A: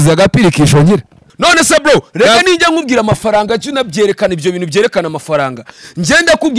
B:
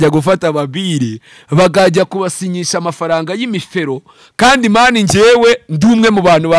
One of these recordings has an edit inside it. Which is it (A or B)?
A